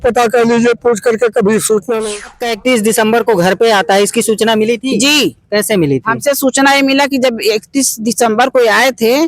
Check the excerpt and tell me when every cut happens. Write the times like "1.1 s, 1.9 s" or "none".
2.3 s

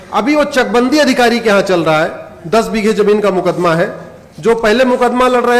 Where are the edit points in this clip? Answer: none

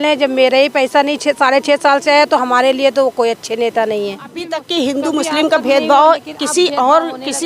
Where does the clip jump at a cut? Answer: 4.6 s

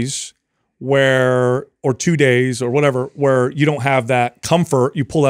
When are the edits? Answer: none

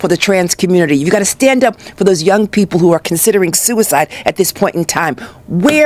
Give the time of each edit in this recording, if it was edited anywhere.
none

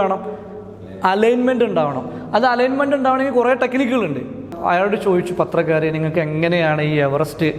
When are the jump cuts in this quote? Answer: 4.5 s

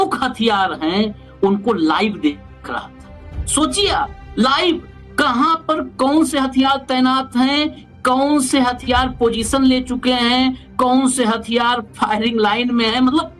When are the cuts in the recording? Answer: none

